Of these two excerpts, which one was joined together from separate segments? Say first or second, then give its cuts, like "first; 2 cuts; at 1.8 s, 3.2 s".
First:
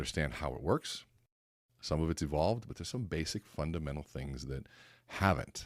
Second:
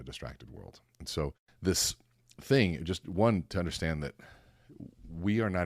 second; 1 cut; at 1.5 s